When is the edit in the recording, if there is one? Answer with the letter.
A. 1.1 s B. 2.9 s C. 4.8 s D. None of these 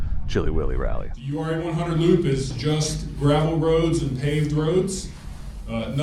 A